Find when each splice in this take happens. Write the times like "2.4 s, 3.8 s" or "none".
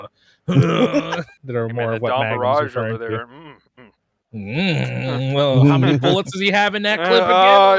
1.3 s